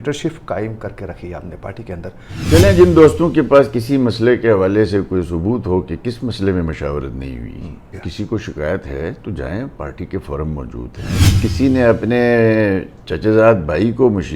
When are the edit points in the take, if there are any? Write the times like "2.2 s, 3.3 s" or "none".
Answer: 2.5 s, 8.0 s, 11.2 s